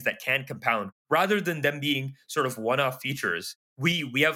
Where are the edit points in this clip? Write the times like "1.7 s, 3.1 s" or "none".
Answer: none